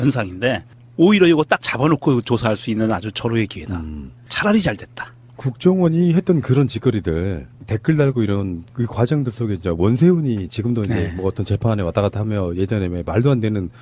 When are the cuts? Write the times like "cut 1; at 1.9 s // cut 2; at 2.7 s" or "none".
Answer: cut 1; at 8.5 s